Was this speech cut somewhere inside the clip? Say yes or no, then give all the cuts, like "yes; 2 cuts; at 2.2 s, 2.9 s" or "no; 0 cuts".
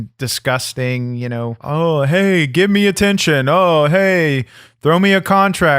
yes; 1 cut; at 1.6 s